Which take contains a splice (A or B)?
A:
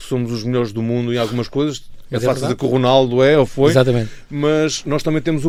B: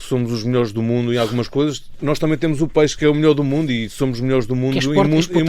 B